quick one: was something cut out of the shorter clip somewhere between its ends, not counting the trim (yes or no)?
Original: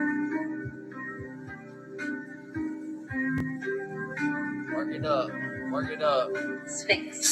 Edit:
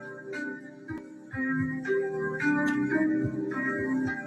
yes